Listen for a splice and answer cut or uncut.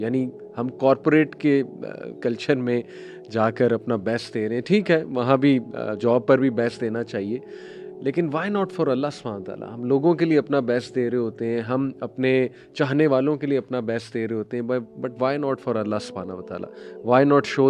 uncut